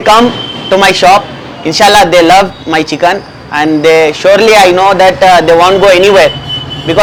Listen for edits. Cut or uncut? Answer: uncut